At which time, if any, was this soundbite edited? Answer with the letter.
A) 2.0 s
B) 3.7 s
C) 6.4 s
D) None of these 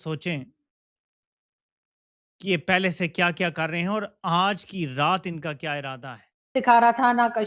C